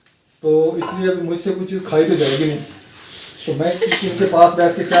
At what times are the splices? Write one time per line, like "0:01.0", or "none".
0:03.7